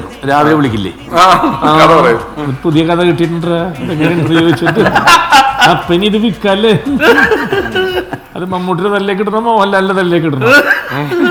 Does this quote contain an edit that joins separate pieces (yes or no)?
no